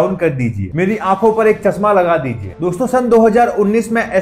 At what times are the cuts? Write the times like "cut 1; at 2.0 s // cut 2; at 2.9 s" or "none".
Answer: cut 1; at 2.8 s